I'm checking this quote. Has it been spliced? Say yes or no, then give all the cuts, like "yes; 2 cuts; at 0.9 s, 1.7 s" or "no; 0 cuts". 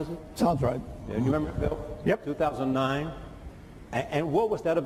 no; 0 cuts